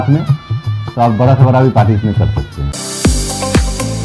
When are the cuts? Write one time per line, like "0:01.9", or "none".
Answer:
0:02.7